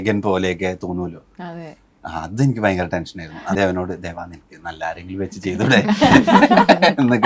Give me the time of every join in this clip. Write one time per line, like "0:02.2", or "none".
0:03.6